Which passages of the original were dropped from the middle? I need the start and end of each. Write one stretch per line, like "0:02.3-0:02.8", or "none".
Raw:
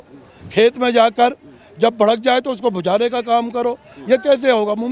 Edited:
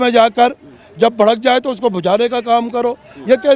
none